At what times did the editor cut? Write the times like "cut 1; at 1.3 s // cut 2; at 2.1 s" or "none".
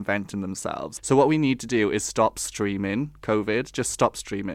cut 1; at 0.9 s